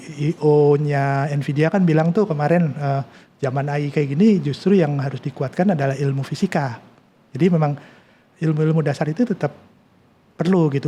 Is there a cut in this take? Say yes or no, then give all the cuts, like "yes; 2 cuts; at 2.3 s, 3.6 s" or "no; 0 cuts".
no; 0 cuts